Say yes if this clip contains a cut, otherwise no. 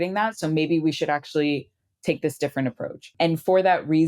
yes